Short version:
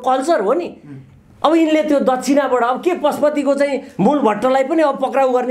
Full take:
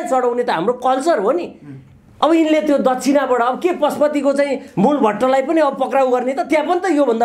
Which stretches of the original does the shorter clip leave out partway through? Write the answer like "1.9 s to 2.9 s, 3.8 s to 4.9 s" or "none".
none